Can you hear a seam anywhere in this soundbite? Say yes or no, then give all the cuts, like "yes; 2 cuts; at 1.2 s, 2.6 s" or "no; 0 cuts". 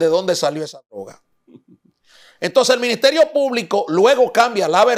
no; 0 cuts